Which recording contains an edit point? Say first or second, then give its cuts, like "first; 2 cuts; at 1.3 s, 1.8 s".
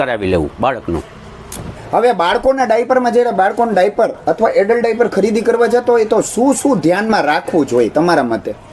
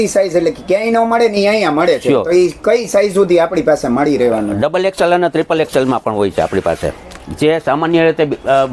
first; 1 cut; at 1.7 s